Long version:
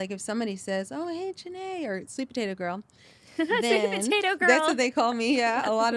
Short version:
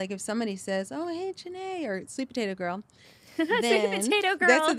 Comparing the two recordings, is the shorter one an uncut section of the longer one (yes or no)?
yes